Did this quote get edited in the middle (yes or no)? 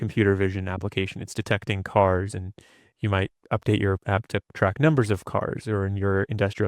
yes